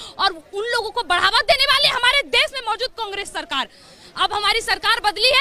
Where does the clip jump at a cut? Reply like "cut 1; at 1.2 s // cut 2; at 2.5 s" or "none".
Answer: none